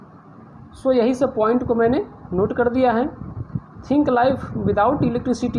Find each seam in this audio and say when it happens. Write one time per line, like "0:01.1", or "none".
none